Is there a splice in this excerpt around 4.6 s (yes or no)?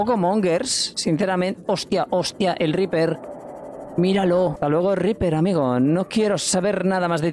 yes